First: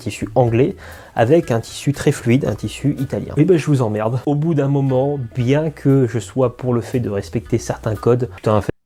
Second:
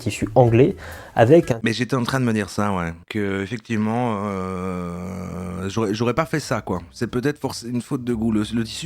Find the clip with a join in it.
second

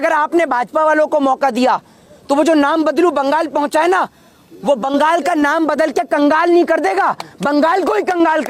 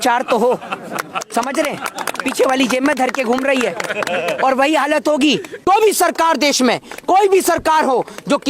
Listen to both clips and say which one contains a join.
second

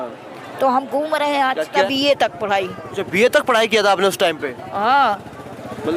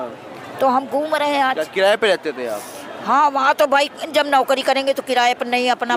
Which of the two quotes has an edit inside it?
first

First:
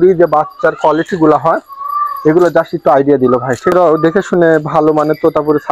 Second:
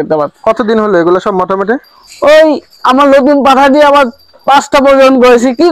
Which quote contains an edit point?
first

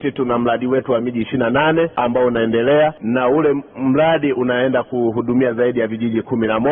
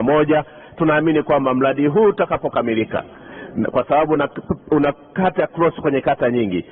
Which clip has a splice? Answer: first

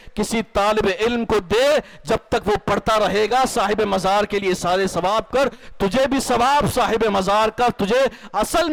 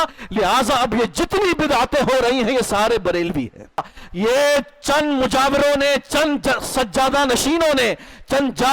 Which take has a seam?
second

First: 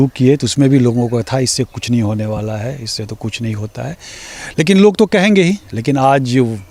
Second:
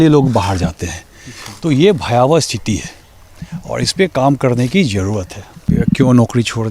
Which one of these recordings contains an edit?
second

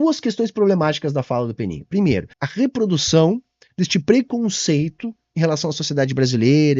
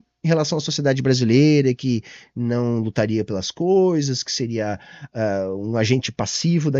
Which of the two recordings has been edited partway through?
first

